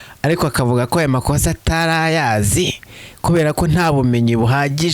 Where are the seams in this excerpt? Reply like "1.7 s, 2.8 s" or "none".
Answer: none